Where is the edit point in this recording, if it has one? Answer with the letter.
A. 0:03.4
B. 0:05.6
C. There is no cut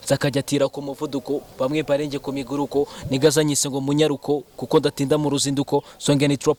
C